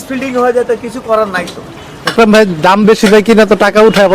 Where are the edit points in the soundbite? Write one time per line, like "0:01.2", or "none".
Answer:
0:02.1